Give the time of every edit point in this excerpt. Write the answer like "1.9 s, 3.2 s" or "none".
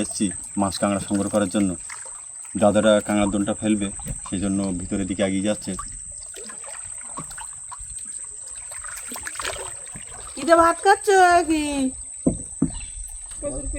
10.2 s